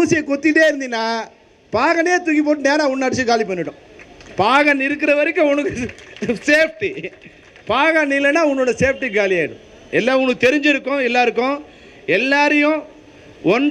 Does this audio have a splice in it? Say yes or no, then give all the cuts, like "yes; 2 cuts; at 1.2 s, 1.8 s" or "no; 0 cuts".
no; 0 cuts